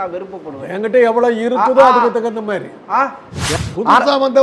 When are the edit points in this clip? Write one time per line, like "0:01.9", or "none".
0:03.5

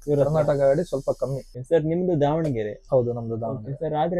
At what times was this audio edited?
0:01.5

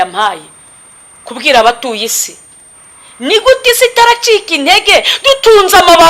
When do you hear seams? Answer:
none

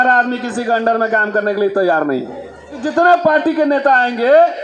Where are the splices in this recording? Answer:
0:02.8

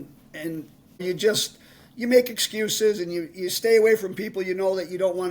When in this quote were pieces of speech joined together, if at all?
0:01.0

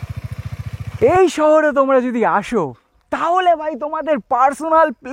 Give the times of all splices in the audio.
0:01.0

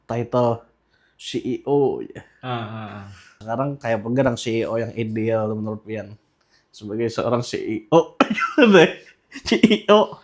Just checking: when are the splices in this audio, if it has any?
0:03.3

